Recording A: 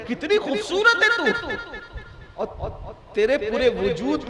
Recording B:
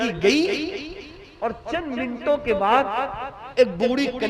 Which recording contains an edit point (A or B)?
A